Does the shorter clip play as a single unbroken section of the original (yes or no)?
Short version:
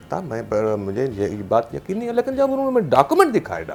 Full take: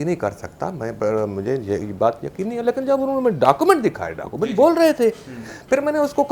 yes